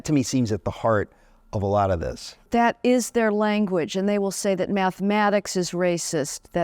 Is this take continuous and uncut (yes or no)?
no